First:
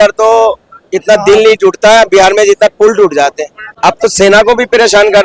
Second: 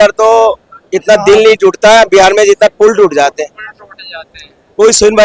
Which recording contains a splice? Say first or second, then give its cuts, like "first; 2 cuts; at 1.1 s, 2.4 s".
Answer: first; 1 cut; at 3.6 s